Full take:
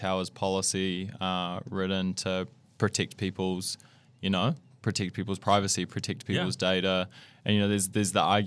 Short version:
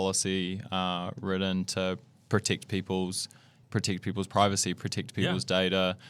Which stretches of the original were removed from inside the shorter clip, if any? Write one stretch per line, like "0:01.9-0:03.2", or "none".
0:04.1-0:04.7